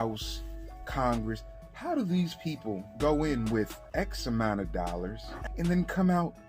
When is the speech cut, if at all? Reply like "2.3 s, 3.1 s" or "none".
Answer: 5.3 s